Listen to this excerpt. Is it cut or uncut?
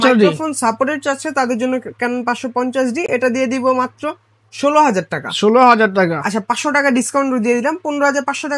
uncut